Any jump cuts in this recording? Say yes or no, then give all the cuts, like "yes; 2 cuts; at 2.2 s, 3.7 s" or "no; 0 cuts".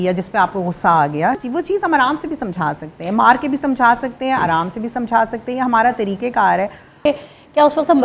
yes; 2 cuts; at 1.4 s, 7.1 s